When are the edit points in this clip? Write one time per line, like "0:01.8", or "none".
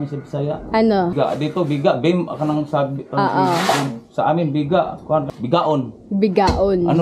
0:01.1
0:05.3